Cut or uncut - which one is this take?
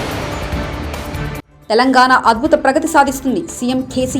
cut